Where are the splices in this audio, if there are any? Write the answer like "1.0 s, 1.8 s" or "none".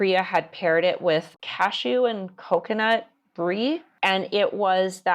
1.4 s, 3.9 s